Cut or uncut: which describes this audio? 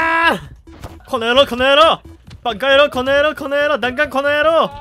cut